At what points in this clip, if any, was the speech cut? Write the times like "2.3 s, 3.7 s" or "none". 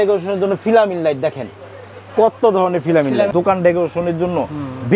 3.3 s